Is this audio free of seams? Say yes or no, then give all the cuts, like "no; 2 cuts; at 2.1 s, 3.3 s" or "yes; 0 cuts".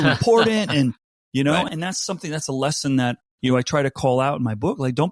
no; 2 cuts; at 1.7 s, 3.3 s